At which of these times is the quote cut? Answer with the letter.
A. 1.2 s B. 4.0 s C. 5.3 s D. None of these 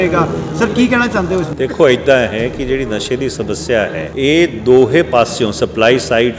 B